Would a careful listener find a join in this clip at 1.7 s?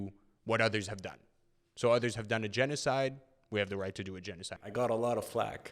no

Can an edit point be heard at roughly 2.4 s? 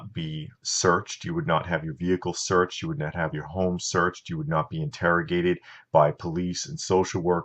no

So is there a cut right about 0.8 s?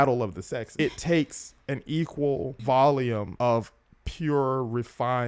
yes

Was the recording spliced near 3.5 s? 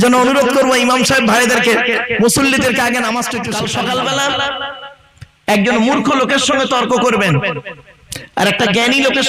yes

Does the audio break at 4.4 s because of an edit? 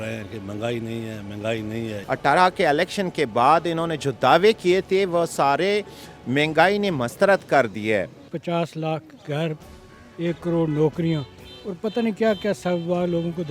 no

